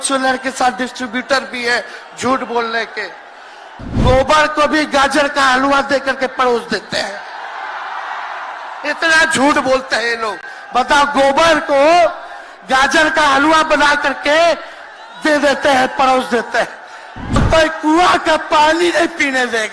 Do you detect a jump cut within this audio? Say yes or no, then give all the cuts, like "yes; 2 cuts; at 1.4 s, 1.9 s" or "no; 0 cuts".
yes; 2 cuts; at 3.7 s, 17.4 s